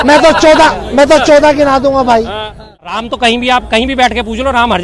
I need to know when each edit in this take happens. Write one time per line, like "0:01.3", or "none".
0:03.0